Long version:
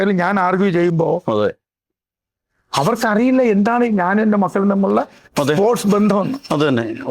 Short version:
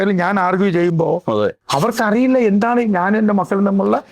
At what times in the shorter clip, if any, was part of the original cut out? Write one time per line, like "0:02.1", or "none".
0:01.6